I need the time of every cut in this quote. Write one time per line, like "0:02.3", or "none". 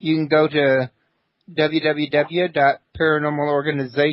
0:02.5